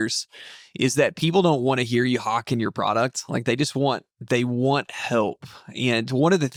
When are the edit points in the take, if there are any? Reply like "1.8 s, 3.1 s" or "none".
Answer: none